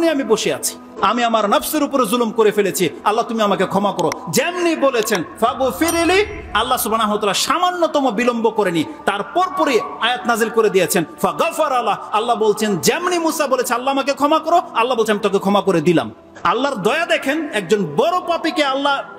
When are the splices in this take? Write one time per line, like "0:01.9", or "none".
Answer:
0:00.9
0:16.2